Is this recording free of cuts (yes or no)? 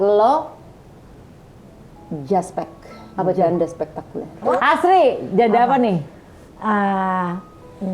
no